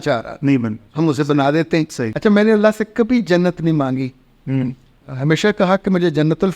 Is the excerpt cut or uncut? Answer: cut